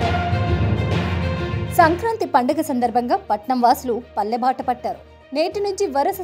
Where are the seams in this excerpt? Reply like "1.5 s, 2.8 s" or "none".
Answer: 1.7 s